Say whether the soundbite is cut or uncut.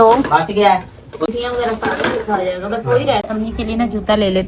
cut